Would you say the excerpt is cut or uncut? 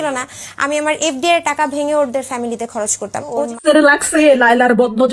cut